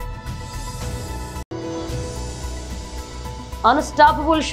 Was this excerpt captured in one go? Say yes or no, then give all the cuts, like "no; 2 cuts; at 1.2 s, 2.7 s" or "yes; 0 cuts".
no; 2 cuts; at 1.4 s, 3.3 s